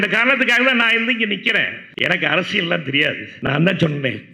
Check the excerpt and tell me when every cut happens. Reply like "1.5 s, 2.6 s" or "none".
1.8 s, 3.3 s